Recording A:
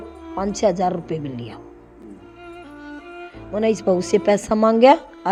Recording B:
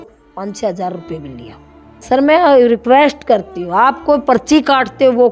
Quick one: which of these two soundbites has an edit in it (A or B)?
B